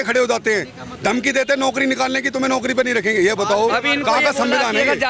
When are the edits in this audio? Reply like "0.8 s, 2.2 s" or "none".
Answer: none